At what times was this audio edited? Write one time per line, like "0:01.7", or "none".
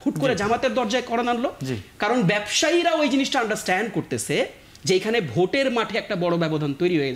none